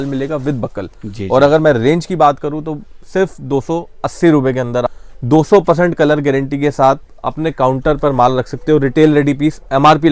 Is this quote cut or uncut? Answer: cut